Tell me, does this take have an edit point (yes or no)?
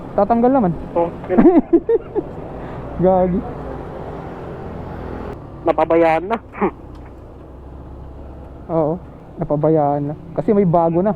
no